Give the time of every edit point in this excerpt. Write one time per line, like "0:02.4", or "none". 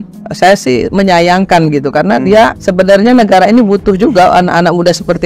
0:02.6